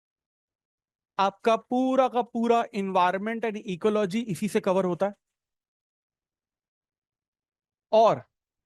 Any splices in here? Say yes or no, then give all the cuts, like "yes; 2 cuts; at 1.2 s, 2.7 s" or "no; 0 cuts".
no; 0 cuts